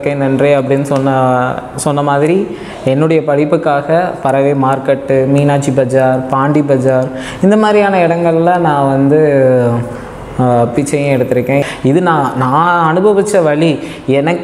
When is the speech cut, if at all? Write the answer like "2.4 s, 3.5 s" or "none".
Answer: 11.6 s